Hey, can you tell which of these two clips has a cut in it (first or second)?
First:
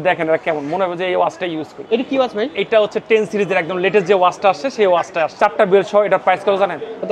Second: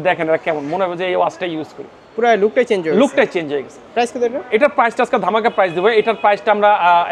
first